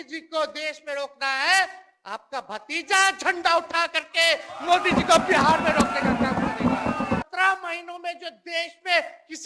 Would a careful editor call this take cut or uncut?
cut